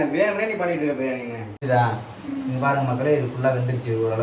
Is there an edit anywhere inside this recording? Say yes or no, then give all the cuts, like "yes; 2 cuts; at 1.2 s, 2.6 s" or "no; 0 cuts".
yes; 1 cut; at 1.6 s